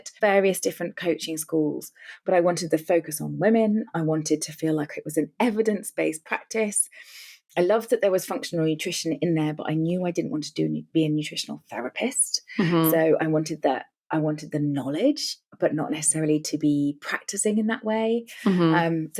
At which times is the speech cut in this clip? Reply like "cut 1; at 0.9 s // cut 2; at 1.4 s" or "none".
none